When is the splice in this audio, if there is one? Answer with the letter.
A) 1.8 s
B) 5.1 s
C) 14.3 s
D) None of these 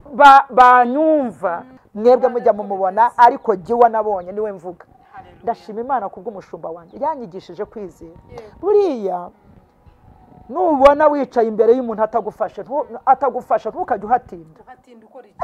A